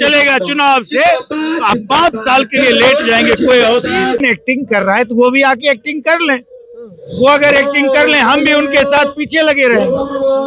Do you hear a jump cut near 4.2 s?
yes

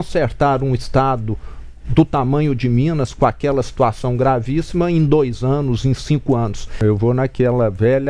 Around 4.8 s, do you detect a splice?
no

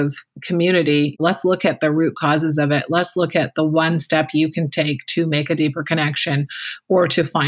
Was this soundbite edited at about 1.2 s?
yes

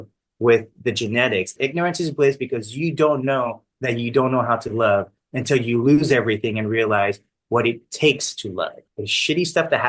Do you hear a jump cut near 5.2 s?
no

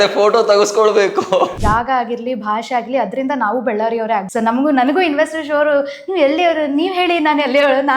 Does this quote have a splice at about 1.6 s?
yes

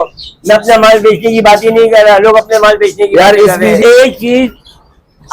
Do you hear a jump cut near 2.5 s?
no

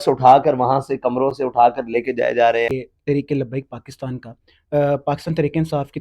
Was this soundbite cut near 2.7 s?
yes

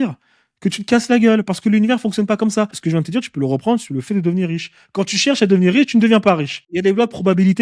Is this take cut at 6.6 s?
yes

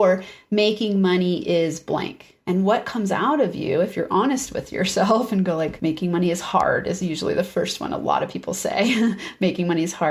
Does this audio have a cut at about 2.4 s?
no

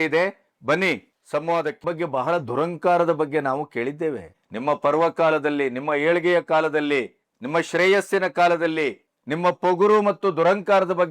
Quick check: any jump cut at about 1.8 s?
yes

